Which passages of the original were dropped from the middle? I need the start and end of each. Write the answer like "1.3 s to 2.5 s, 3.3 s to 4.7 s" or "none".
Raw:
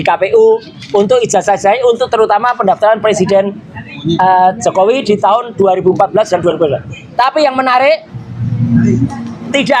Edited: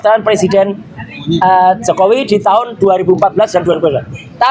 none